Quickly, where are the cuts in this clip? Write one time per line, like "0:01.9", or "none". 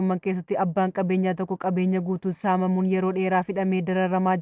none